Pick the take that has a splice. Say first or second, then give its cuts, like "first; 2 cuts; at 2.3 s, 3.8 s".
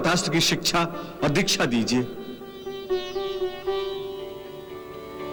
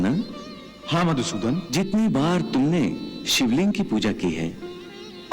second; 1 cut; at 1.7 s